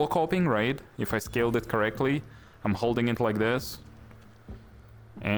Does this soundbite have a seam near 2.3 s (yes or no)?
no